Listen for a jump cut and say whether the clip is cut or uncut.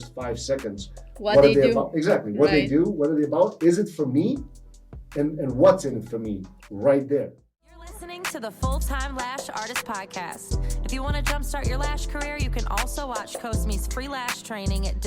cut